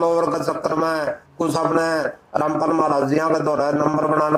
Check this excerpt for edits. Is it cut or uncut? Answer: uncut